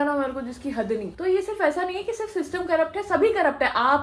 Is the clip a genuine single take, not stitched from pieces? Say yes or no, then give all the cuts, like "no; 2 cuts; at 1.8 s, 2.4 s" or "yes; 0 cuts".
no; 1 cut; at 1.1 s